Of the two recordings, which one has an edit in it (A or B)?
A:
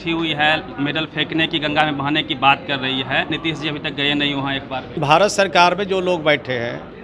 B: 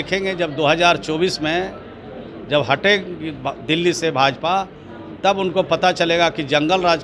A